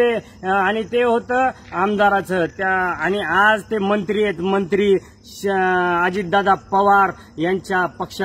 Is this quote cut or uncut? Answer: uncut